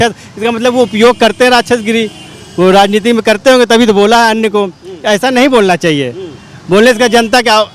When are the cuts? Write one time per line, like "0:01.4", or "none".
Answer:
none